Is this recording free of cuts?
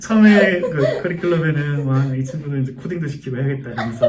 yes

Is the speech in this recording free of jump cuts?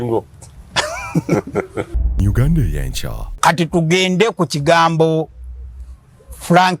no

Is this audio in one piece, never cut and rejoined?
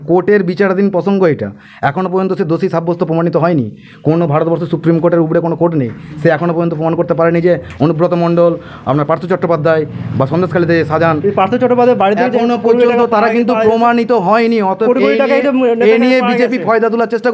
yes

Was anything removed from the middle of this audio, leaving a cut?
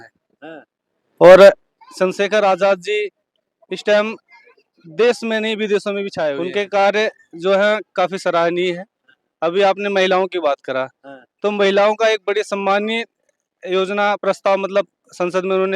no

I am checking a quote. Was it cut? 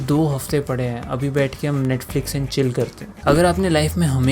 yes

